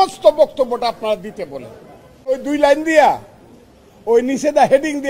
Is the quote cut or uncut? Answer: cut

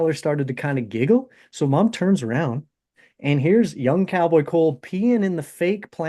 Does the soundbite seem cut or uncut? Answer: uncut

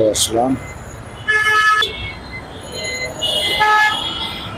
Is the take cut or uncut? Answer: cut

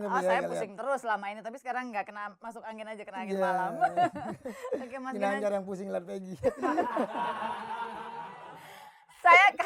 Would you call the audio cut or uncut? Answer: uncut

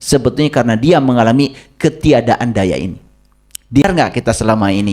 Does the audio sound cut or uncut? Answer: cut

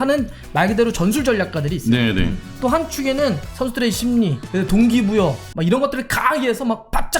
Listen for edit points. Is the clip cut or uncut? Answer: cut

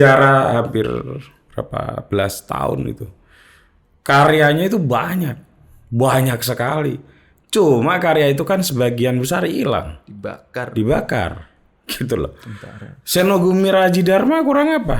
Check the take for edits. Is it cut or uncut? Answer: uncut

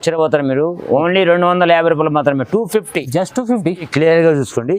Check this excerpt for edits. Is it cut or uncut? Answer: cut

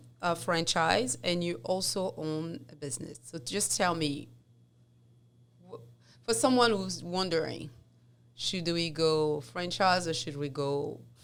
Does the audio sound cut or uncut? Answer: uncut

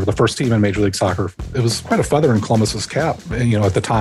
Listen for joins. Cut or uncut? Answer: cut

